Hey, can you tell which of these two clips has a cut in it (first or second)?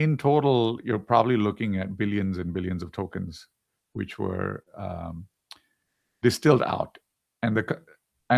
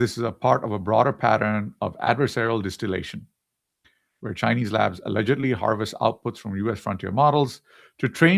first